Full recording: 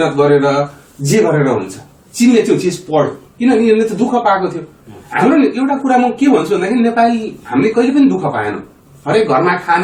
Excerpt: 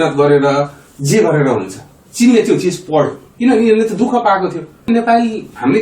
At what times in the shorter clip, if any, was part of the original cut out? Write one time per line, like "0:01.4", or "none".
0:04.9